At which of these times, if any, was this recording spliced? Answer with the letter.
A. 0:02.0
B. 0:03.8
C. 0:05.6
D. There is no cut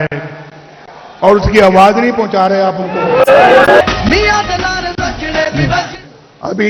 D